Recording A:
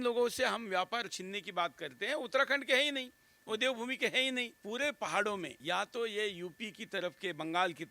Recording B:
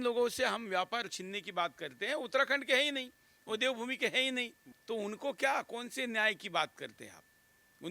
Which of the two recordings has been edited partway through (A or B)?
A